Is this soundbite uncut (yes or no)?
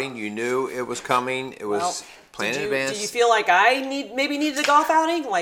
no